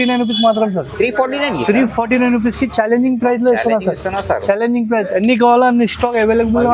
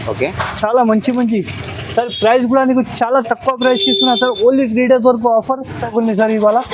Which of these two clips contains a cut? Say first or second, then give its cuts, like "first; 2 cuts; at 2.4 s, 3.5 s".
second; 1 cut; at 5.8 s